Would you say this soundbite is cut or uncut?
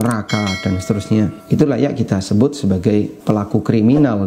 cut